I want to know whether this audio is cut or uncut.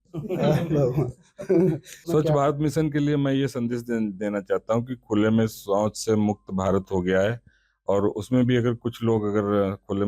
cut